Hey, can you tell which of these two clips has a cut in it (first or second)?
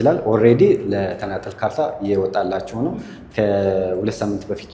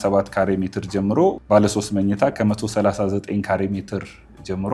second